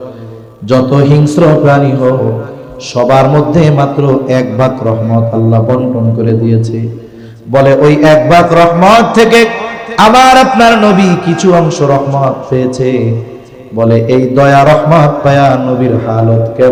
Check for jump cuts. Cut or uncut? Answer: uncut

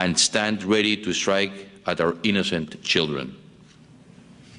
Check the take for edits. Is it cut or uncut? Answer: cut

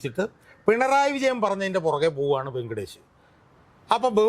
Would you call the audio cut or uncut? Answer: uncut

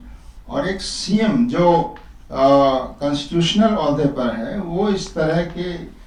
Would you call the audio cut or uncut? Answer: uncut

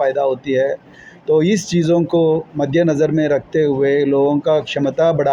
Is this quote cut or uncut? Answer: uncut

